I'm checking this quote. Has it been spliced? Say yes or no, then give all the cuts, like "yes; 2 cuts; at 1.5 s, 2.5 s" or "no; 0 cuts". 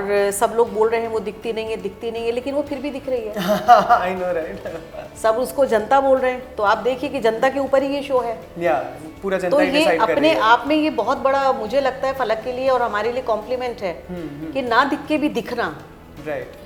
no; 0 cuts